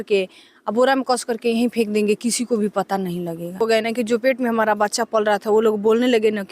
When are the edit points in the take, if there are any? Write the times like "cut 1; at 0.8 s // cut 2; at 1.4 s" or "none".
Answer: cut 1; at 3.6 s